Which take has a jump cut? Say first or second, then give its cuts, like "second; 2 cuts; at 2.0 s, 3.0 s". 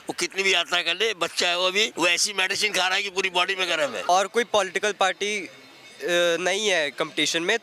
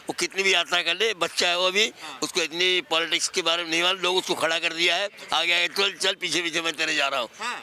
first; 2 cuts; at 1.9 s, 4.1 s